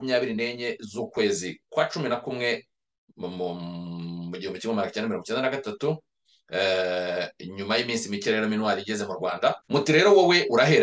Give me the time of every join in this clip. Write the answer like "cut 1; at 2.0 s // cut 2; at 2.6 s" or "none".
cut 1; at 9.6 s